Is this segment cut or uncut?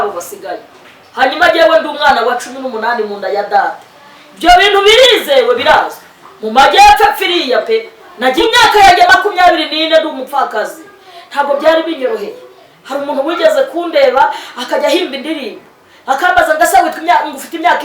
cut